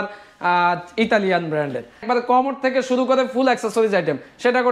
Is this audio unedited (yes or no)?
no